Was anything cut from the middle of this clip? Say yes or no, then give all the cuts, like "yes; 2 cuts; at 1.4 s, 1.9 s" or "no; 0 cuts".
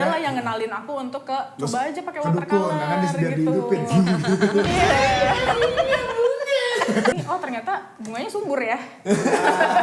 yes; 1 cut; at 7.1 s